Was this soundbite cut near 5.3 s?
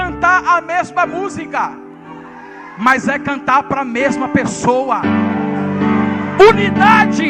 no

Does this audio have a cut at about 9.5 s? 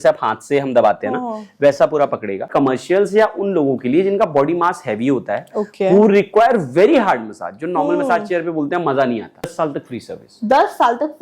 yes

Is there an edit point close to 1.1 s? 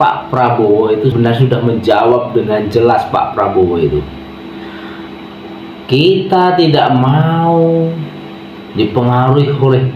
yes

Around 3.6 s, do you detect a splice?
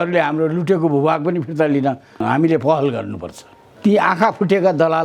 yes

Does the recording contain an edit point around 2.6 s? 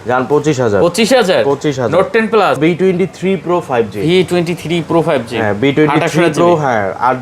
yes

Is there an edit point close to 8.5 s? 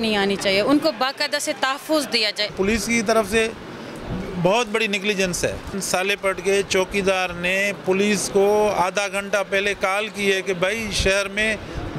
no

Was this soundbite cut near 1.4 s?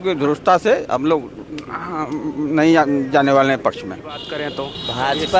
no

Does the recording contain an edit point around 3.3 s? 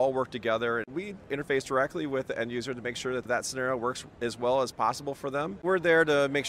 yes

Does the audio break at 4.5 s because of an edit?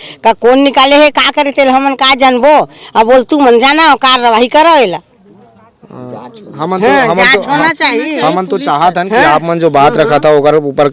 no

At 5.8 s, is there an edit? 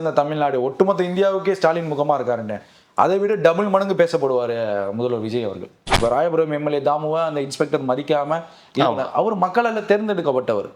yes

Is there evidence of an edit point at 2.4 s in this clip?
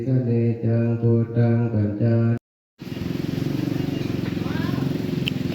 yes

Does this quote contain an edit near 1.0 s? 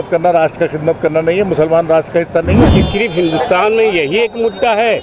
no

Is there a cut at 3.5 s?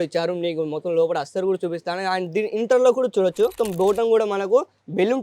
yes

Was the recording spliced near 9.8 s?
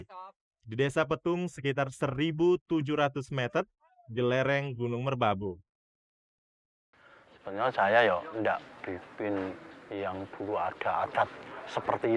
no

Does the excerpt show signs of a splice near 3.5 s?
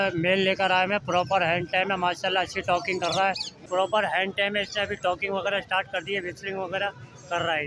yes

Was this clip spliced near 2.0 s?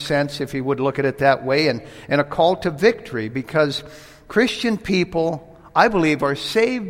no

